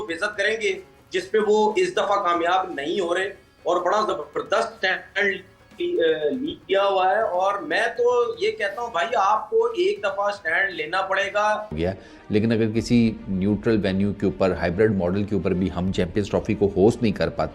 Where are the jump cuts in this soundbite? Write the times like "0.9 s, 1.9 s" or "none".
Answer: 11.7 s